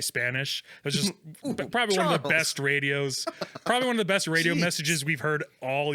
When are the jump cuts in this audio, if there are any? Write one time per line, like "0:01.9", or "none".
none